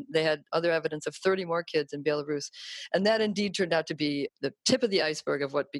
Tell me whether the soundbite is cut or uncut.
uncut